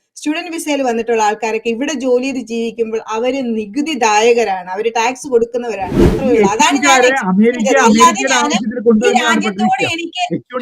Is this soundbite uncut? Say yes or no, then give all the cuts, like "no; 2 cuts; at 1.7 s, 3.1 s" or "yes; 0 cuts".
no; 1 cut; at 6.0 s